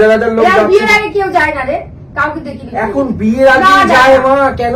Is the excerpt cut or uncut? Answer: uncut